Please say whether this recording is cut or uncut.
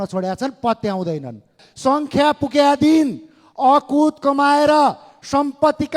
cut